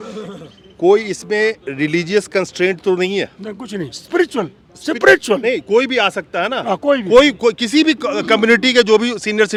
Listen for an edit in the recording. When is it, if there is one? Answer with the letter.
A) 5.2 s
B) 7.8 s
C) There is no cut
C